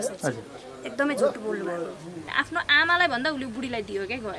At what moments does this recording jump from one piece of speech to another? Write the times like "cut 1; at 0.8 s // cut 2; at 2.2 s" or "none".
cut 1; at 2.2 s

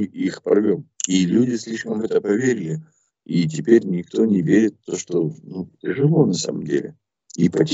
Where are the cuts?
cut 1; at 0.9 s

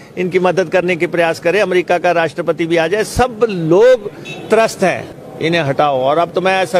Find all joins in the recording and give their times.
cut 1; at 5.1 s

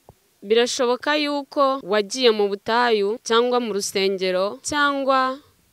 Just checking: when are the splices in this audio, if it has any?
cut 1; at 1.8 s // cut 2; at 3.2 s // cut 3; at 4.6 s

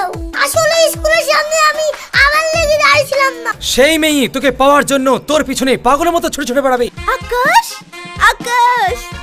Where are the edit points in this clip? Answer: cut 1; at 3.5 s // cut 2; at 6.9 s

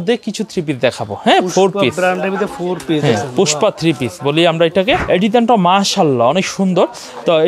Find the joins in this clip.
cut 1; at 5.0 s

